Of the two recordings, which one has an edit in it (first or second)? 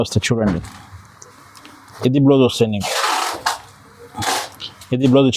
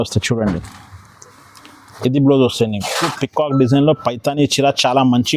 second